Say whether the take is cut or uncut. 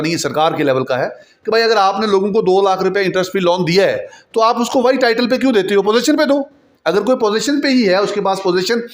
uncut